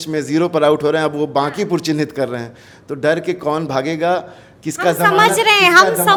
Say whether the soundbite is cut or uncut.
uncut